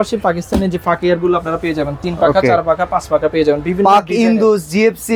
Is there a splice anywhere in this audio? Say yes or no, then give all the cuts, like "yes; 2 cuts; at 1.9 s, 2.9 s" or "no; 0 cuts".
no; 0 cuts